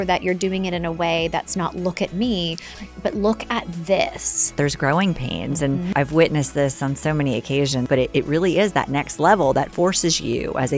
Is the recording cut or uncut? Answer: cut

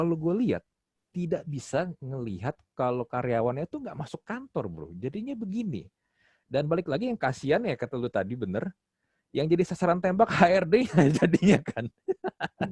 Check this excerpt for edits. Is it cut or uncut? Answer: uncut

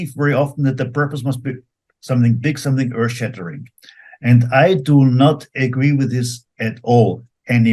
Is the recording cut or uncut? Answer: uncut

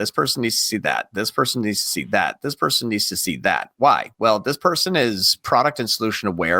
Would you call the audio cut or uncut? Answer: cut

